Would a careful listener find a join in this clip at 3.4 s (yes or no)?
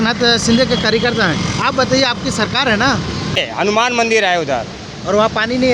yes